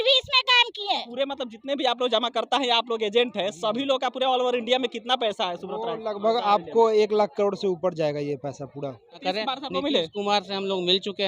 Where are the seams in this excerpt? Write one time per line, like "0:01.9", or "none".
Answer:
0:01.1
0:09.2